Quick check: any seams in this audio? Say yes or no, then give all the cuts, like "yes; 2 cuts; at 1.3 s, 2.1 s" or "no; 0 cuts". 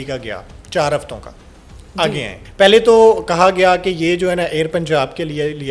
yes; 1 cut; at 2.4 s